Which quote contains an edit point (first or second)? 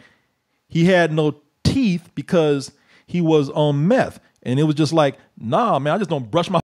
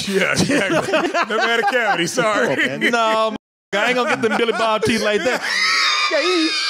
second